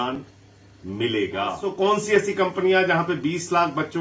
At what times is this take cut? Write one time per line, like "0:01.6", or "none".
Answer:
0:01.6